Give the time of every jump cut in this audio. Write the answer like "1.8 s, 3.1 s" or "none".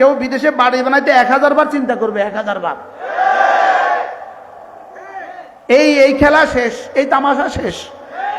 none